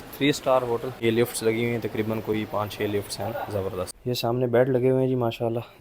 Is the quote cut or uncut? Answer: cut